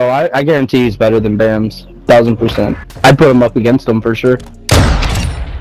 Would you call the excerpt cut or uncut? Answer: cut